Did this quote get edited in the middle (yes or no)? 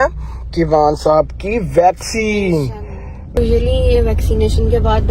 yes